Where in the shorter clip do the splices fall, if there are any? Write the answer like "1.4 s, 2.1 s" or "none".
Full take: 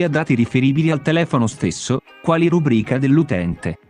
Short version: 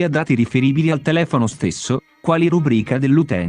none